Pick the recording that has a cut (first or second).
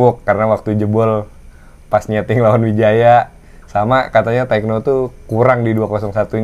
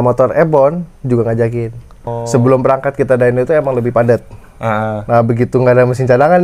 second